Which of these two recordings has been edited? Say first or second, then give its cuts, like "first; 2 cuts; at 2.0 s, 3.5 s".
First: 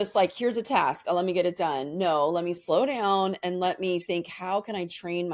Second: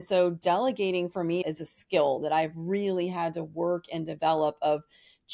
second; 1 cut; at 1.4 s